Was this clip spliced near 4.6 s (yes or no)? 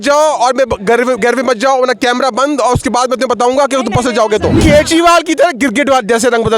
yes